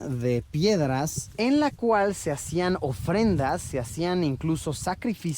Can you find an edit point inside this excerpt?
yes; 1 cut; at 1.2 s

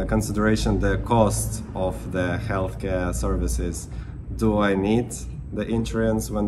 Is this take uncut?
yes; 0 cuts

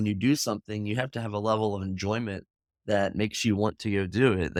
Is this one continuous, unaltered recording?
yes; 0 cuts

